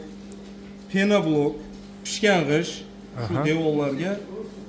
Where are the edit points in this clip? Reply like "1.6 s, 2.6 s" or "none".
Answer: none